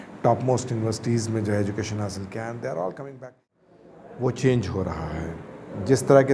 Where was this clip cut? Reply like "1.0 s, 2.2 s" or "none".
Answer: 3.5 s

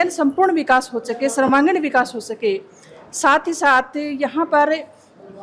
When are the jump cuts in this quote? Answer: none

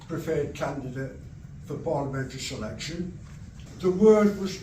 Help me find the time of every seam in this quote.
3.6 s

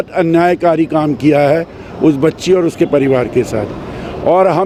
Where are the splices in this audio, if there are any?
none

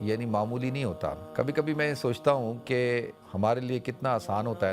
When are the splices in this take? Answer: 1.2 s, 3.2 s

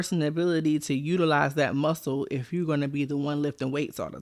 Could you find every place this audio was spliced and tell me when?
none

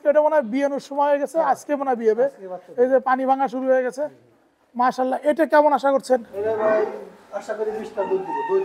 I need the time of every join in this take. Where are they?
none

